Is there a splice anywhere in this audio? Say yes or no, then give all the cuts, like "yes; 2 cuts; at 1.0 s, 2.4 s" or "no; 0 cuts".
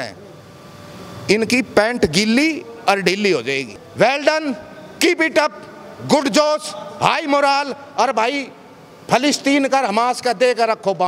yes; 1 cut; at 3.8 s